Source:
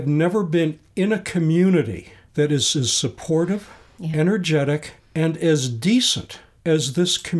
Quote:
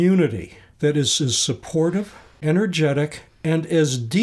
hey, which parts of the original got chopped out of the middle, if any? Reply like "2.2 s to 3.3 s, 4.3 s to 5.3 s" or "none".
3.8 s to 4.0 s